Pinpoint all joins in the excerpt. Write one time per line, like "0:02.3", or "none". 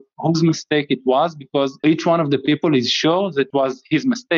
0:03.5

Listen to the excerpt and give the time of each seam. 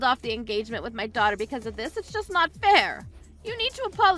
none

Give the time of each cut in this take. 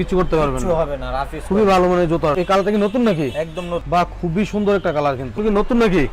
0:02.3
0:05.4

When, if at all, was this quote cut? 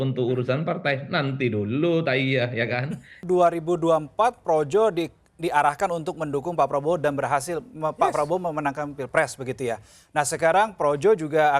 0:03.2

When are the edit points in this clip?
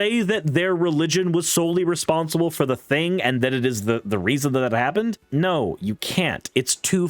0:05.2

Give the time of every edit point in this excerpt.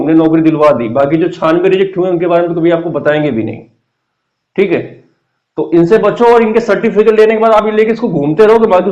none

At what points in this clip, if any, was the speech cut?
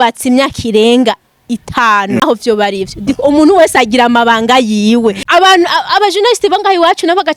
0:02.2
0:05.2

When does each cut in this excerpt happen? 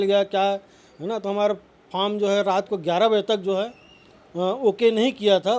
none

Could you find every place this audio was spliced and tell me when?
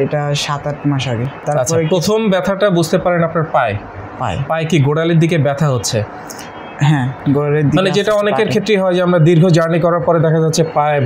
0:01.3

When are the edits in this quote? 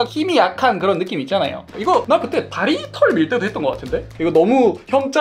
0:01.6

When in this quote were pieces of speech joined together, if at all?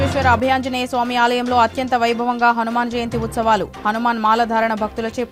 none

